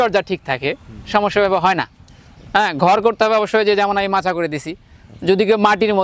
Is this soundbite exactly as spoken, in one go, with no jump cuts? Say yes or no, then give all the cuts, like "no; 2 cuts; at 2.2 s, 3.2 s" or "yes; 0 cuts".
yes; 0 cuts